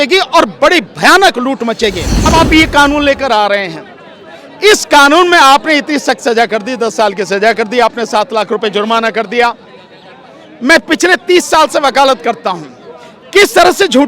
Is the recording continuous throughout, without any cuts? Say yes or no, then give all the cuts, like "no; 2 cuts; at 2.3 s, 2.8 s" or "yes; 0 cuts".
no; 1 cut; at 2.1 s